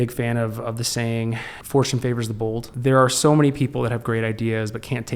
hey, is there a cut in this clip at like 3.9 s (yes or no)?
no